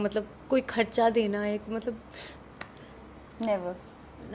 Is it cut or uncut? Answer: uncut